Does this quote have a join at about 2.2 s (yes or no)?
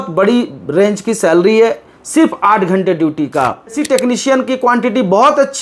no